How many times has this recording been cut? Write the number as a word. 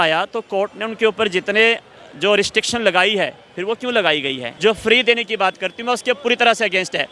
one